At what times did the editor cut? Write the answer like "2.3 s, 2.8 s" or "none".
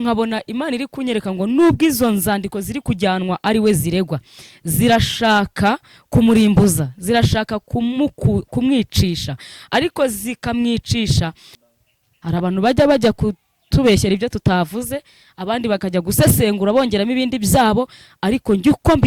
11.7 s